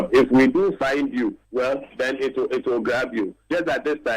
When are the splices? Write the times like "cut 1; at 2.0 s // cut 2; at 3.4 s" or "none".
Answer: none